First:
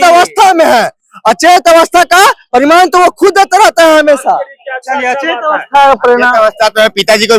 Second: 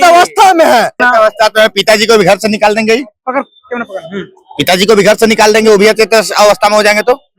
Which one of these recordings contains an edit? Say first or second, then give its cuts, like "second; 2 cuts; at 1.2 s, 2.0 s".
second; 1 cut; at 1.0 s